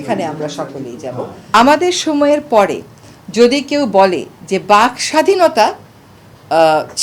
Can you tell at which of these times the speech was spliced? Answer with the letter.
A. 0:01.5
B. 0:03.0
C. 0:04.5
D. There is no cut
A